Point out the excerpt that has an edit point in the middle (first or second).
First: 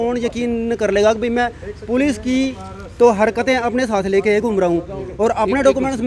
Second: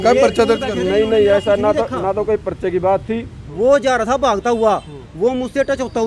second